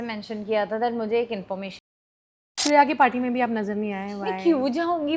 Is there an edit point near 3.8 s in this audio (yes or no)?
no